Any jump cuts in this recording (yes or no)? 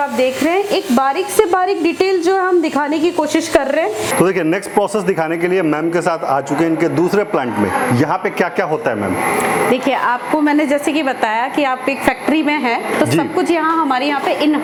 no